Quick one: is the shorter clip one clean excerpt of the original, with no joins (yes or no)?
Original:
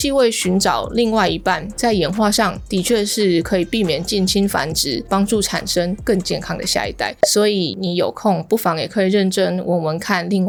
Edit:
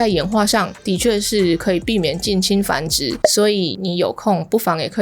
no